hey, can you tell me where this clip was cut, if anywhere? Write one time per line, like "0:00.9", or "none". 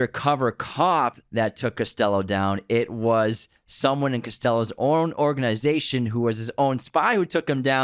none